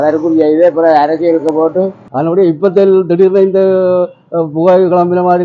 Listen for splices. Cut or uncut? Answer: cut